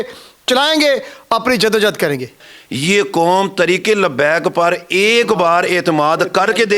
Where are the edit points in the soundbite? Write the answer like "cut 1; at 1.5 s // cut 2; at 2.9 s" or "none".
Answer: cut 1; at 2.5 s